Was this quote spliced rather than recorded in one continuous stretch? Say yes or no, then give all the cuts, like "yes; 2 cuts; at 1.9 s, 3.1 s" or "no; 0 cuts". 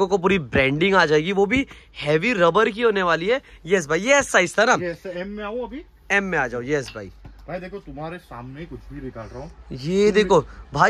no; 0 cuts